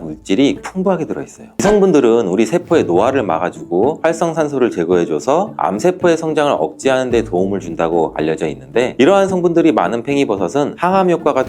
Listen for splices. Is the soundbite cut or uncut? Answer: cut